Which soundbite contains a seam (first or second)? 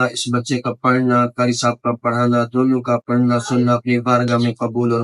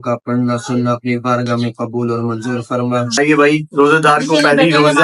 second